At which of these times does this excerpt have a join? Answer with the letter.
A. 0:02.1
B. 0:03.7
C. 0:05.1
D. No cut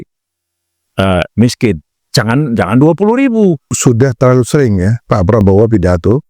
B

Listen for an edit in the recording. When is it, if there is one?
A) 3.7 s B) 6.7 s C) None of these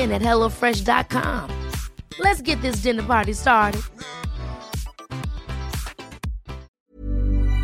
B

